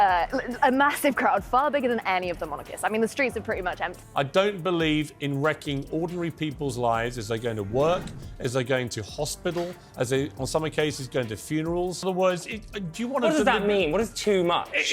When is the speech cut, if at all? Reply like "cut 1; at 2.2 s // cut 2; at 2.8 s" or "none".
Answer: cut 1; at 4.0 s // cut 2; at 12.0 s